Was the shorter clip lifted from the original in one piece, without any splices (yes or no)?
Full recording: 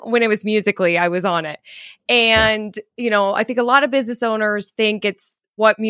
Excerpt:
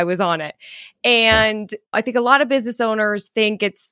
no